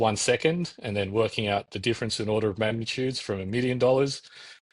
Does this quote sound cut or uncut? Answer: uncut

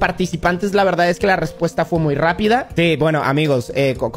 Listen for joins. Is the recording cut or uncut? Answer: uncut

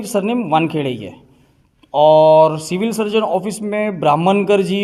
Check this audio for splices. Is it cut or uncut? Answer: uncut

